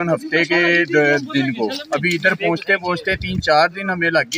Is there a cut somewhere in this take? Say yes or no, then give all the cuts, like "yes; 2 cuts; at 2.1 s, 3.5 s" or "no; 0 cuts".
no; 0 cuts